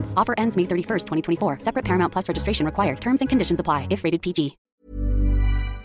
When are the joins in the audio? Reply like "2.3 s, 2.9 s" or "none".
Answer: 4.6 s